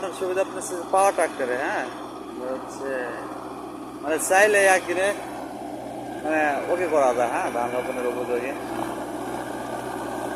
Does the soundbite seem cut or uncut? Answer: uncut